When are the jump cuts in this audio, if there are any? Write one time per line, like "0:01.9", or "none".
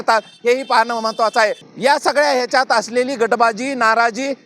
0:01.6